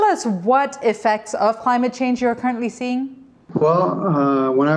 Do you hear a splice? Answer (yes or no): no